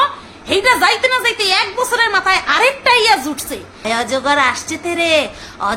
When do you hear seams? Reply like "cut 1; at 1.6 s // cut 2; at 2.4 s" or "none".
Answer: cut 1; at 3.7 s